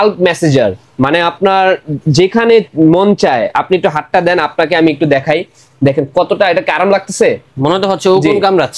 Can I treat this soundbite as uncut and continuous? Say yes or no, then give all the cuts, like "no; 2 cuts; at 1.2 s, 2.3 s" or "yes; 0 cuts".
yes; 0 cuts